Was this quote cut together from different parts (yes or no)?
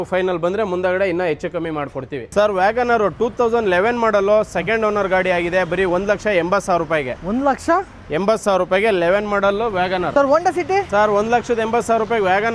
no